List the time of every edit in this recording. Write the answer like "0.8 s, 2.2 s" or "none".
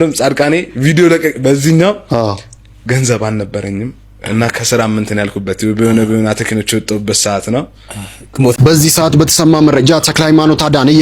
8.6 s